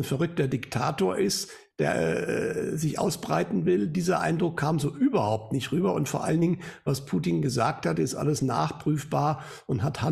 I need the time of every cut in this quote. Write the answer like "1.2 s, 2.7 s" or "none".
none